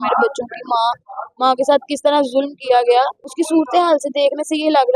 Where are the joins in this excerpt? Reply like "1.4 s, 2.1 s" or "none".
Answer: 3.3 s